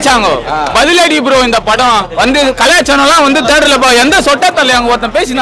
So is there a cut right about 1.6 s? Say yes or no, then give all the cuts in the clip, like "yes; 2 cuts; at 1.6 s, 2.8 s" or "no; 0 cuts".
no; 0 cuts